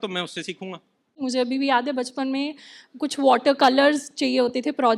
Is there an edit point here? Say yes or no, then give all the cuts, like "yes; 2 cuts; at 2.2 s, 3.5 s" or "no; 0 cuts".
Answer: yes; 1 cut; at 1.2 s